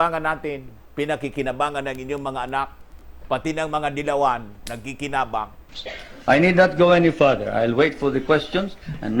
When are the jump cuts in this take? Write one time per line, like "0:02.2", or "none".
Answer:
0:05.6